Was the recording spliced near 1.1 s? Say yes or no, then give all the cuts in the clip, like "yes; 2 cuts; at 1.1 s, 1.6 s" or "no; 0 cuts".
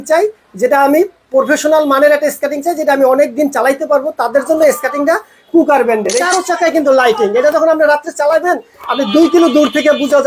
no; 1 cut; at 6.2 s